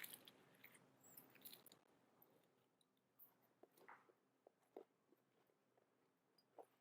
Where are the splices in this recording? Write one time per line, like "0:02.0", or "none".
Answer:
0:02.8